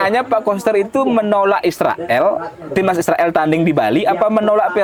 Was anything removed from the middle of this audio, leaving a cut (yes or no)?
no